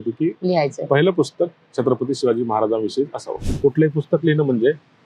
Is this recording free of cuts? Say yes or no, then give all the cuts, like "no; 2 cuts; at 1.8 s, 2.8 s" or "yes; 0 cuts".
no; 1 cut; at 3.5 s